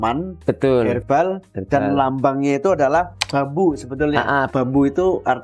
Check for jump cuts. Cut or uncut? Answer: cut